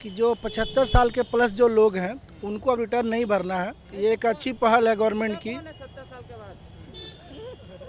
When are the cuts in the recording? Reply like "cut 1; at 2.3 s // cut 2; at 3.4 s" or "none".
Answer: none